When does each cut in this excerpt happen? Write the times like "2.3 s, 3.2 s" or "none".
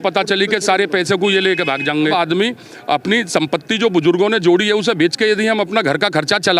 2.1 s